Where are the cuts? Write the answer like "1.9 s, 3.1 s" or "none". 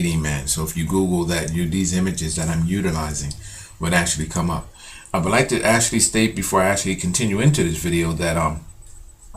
2.6 s